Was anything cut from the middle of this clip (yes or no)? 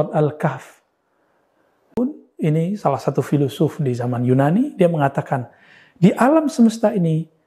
yes